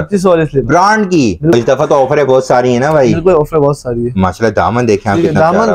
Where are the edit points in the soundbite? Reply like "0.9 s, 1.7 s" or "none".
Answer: 1.5 s